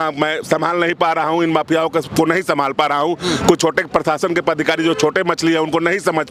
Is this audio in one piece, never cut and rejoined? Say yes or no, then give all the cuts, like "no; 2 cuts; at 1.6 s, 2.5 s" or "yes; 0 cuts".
yes; 0 cuts